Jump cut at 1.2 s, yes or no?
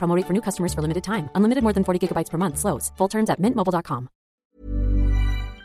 no